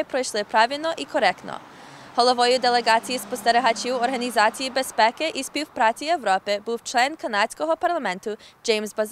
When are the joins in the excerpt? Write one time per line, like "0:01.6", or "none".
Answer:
0:01.7